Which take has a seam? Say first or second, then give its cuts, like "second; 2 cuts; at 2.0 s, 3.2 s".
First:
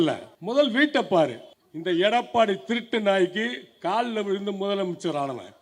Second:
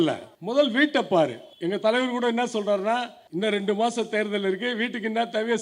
first; 1 cut; at 1.5 s